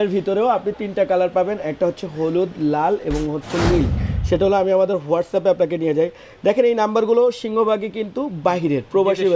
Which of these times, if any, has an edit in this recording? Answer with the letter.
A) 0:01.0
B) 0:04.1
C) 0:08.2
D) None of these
B